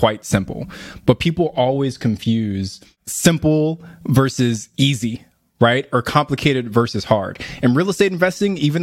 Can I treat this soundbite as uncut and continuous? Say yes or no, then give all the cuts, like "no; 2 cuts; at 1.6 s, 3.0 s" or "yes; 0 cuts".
yes; 0 cuts